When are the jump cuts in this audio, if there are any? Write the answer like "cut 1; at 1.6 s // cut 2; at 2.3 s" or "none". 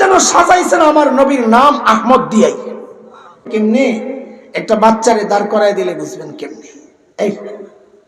cut 1; at 3.4 s